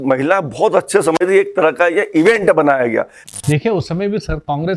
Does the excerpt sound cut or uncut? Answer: cut